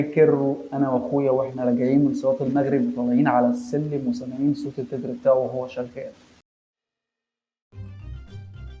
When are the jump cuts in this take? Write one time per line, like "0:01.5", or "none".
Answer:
0:06.5